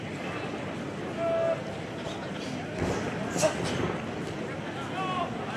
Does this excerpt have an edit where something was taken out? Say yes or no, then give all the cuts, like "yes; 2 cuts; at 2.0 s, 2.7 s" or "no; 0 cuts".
no; 0 cuts